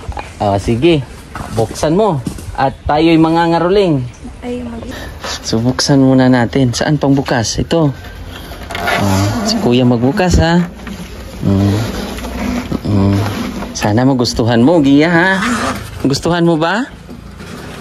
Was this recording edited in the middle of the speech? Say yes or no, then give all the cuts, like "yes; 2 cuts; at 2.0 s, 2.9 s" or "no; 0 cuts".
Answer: yes; 1 cut; at 4.8 s